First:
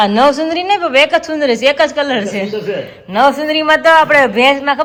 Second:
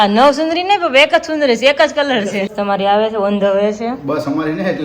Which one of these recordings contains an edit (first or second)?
second